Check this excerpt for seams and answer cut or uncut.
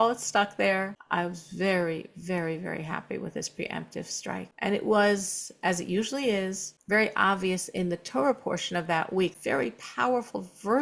cut